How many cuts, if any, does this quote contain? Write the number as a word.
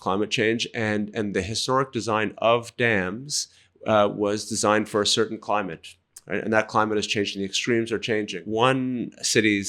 one